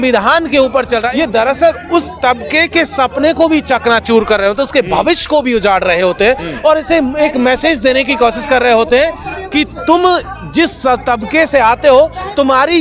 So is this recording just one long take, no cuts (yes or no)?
no